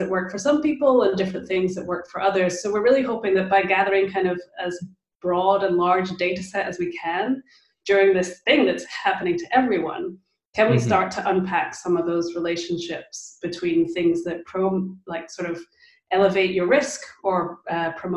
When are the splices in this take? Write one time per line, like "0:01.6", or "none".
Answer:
none